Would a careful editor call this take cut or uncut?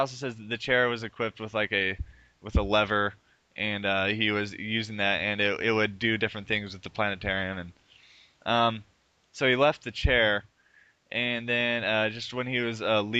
uncut